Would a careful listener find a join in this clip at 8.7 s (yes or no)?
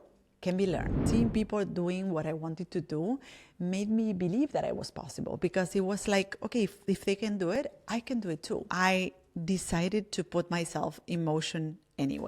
yes